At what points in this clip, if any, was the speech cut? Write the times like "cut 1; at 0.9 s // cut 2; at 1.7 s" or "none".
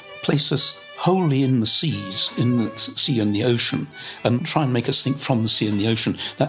cut 1; at 4.4 s